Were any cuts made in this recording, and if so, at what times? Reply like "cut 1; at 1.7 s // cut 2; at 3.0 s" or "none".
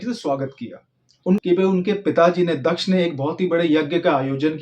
cut 1; at 1.4 s